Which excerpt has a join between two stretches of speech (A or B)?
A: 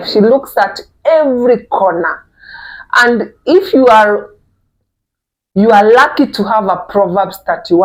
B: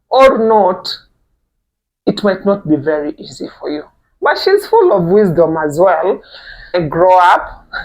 B